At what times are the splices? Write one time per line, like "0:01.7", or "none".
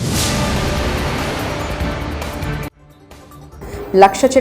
none